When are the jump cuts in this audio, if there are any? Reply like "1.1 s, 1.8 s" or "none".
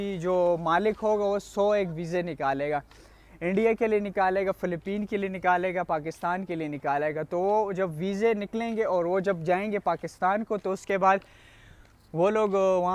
none